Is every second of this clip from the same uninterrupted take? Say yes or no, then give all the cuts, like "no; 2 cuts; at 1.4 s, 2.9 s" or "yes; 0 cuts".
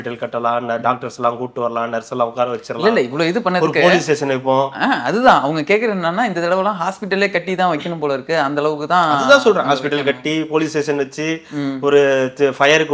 yes; 0 cuts